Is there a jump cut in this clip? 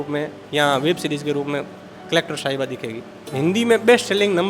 yes; 1 cut; at 3.3 s

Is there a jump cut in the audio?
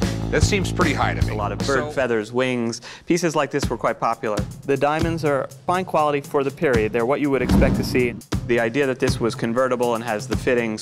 yes; 1 cut; at 1.5 s

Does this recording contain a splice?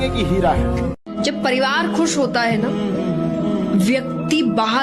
no; 0 cuts

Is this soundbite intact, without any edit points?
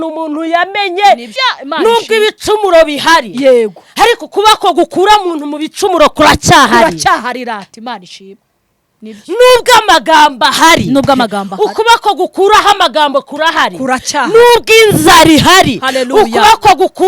no; 1 cut; at 1.4 s

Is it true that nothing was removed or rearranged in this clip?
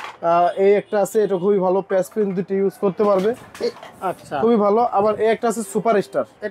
yes; 0 cuts

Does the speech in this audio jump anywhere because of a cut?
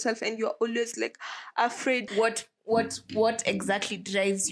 yes; 1 cut; at 2.1 s

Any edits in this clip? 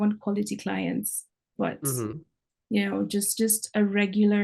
no; 0 cuts

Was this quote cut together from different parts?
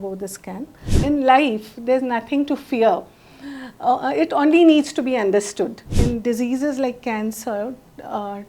yes; 2 cuts; at 0.9 s, 5.9 s

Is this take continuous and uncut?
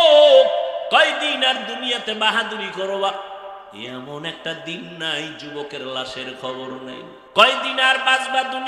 no; 1 cut; at 7.2 s

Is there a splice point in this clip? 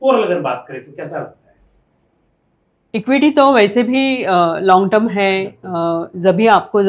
no; 0 cuts

